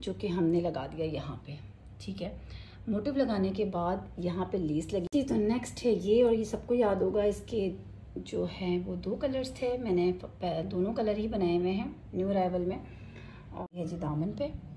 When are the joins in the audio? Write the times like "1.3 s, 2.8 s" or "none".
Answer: 5.1 s, 13.7 s